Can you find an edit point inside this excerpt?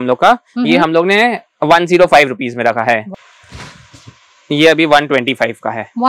yes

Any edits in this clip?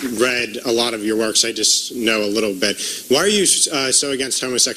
no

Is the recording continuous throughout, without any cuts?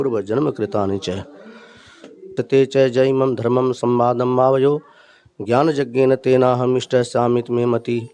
no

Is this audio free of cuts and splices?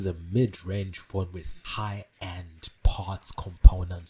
no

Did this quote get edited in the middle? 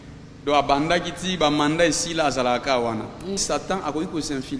yes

